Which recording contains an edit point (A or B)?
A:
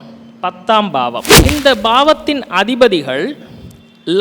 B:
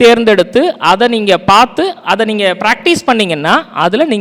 A